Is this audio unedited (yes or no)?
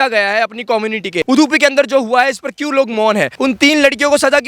no